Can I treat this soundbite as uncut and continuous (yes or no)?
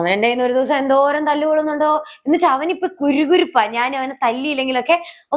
yes